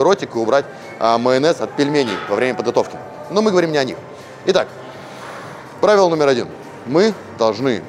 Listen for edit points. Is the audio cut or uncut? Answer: uncut